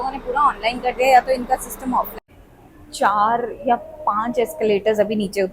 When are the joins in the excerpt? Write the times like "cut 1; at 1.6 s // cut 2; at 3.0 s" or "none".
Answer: cut 1; at 2.2 s